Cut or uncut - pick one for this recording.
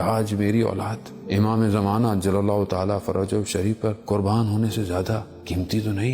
cut